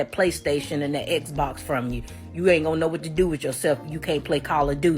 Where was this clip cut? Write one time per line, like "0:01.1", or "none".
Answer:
0:02.2